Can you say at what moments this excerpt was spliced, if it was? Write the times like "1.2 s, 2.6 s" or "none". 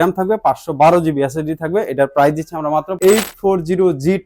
2.9 s